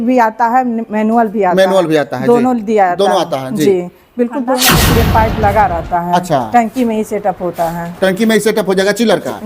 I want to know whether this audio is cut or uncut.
cut